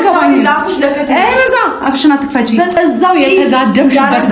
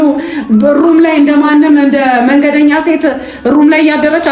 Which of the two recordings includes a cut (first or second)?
first